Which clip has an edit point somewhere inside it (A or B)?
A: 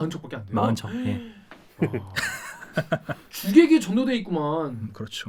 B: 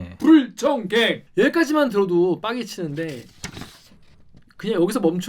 B